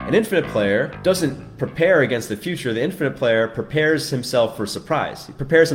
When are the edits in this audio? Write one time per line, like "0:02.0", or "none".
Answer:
0:00.9